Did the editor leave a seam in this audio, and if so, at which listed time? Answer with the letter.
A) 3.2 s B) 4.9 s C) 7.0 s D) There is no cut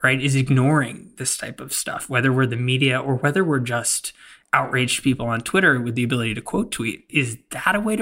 C